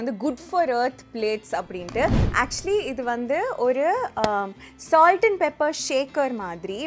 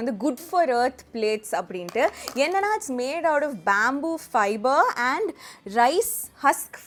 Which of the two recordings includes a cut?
first; 1 cut; at 2.2 s

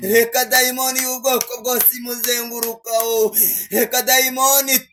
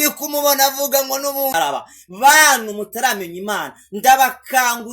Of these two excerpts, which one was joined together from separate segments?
second; 1 cut; at 1.5 s

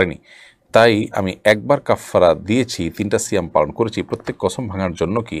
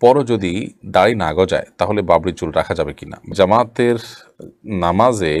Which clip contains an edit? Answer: second; 1 cut; at 3.3 s

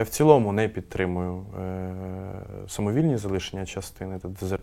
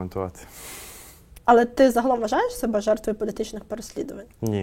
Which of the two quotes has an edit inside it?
second; 1 cut; at 1.3 s

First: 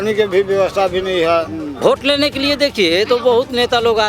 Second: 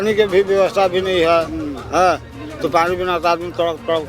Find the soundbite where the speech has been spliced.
first; 1 cut; at 1.7 s

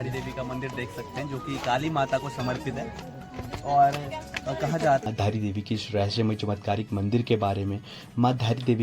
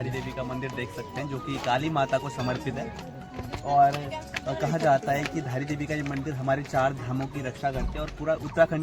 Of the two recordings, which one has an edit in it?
first; 1 cut; at 5.0 s

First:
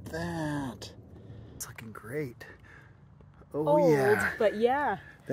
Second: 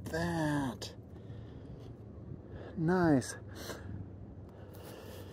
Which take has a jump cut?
first; 1 cut; at 1.7 s

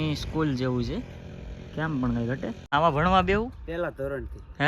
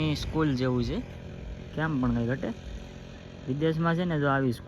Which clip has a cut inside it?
first; 1 cut; at 2.5 s

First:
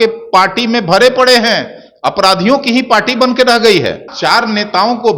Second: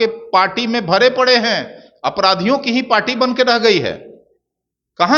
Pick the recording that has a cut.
first; 1 cut; at 4.1 s

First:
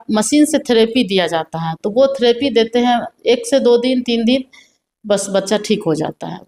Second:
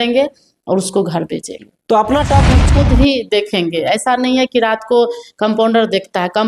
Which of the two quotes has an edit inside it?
second; 1 cut; at 2.6 s

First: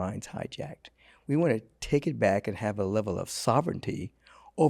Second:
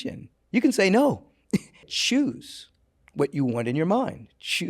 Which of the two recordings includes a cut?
second; 1 cut; at 1.9 s

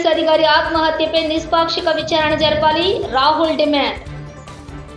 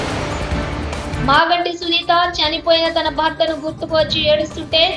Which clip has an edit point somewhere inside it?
second; 1 cut; at 1.1 s

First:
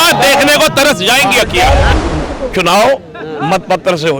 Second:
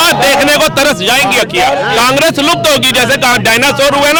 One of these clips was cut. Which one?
first; 1 cut; at 1.9 s

